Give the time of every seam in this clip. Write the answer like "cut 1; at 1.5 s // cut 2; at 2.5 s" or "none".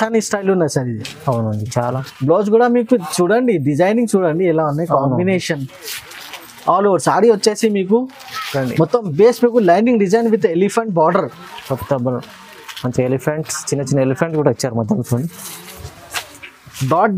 cut 1; at 1.9 s // cut 2; at 15.8 s

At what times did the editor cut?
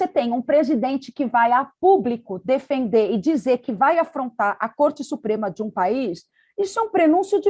none

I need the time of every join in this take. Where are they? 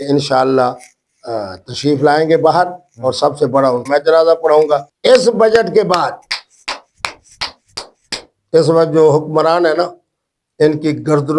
cut 1; at 3.8 s // cut 2; at 4.9 s

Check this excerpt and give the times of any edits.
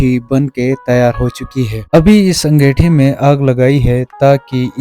cut 1; at 1.8 s

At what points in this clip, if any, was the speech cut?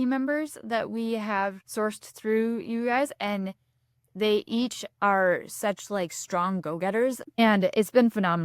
cut 1; at 7.3 s

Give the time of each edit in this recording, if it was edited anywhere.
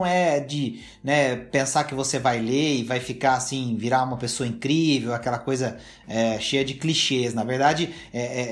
none

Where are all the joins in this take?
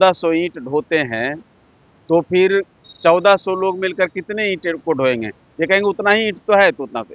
none

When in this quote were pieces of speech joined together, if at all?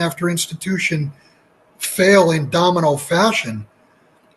none

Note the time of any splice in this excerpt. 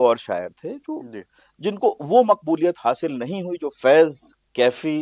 none

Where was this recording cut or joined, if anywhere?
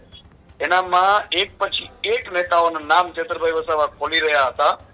none

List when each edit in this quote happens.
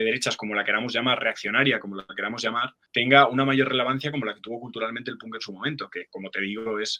none

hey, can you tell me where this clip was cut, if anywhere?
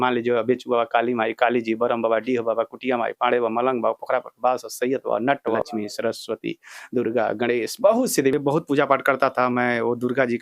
cut 1; at 5.6 s // cut 2; at 8.3 s

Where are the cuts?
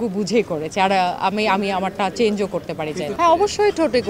cut 1; at 3.1 s

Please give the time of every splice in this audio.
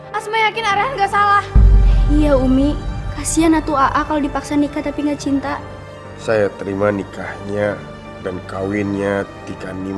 cut 1; at 6.1 s

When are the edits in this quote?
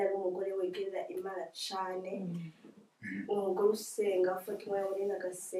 none

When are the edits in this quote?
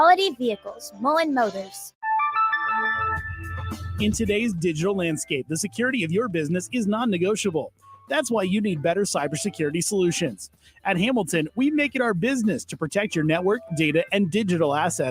cut 1; at 2.0 s

